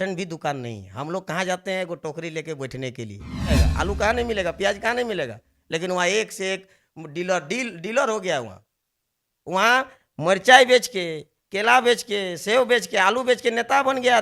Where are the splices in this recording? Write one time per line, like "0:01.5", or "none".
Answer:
0:03.5